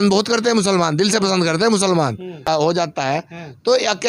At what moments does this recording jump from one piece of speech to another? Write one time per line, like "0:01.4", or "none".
0:02.5